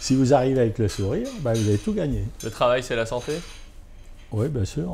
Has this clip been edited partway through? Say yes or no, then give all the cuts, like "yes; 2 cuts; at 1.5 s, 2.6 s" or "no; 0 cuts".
no; 0 cuts